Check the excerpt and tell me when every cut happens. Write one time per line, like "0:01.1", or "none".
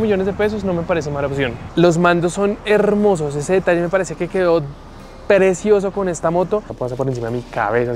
0:01.6
0:06.7